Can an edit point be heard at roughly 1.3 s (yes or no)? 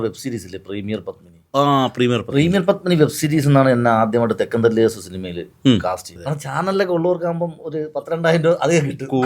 no